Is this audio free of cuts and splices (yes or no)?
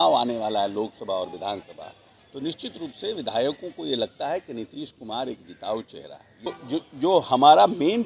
no